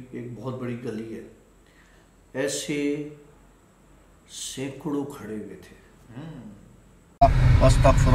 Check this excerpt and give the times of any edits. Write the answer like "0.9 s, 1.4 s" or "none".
7.2 s